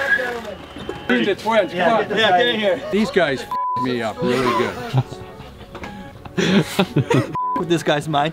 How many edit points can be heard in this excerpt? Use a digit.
2